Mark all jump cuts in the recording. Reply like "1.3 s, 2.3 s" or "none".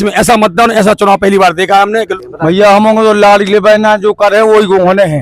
2.1 s